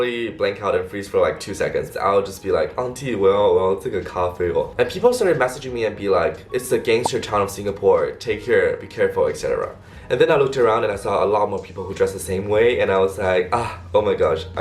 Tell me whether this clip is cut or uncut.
cut